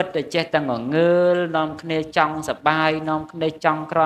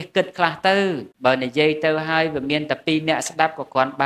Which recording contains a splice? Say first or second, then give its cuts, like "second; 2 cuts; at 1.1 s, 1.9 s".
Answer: second; 1 cut; at 1.1 s